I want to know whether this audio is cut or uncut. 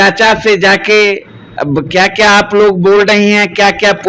uncut